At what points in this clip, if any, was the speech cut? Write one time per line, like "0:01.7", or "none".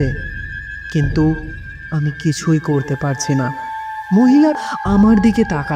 0:04.6